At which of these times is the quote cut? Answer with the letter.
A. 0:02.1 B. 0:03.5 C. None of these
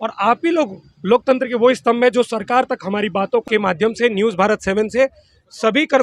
B